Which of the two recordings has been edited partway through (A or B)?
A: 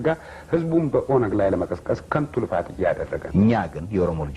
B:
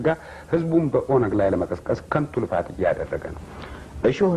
A